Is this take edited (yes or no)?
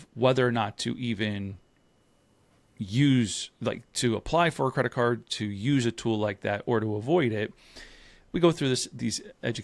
no